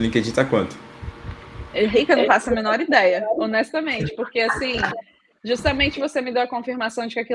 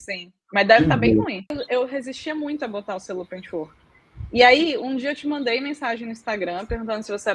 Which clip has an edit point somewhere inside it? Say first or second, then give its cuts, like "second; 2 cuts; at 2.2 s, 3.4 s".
second; 1 cut; at 1.6 s